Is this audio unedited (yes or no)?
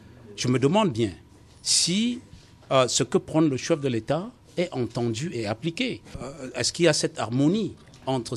no